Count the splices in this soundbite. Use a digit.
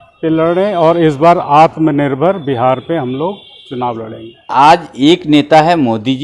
1